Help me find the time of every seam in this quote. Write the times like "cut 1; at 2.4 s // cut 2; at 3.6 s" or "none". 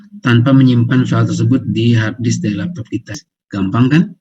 cut 1; at 3.2 s